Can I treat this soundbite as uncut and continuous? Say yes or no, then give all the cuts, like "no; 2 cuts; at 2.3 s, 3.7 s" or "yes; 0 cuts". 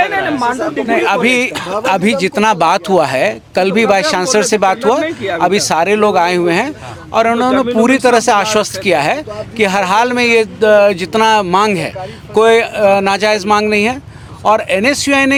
yes; 0 cuts